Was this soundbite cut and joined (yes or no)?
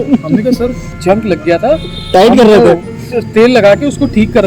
no